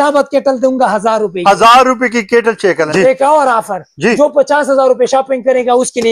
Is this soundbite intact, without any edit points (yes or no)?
no